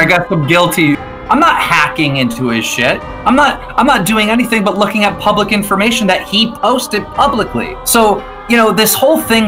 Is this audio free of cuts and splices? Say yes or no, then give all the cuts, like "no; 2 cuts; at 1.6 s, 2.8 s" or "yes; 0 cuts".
no; 3 cuts; at 1.1 s, 3.1 s, 7.8 s